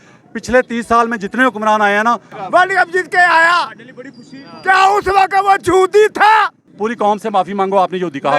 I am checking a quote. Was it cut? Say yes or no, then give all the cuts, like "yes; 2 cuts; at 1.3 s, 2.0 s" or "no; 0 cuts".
yes; 2 cuts; at 2.3 s, 6.7 s